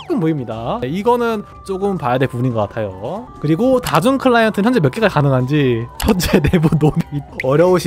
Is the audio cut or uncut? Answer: cut